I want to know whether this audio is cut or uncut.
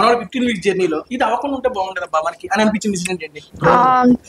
cut